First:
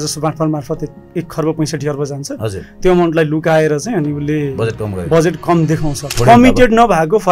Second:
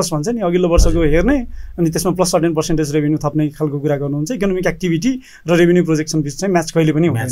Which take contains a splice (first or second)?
first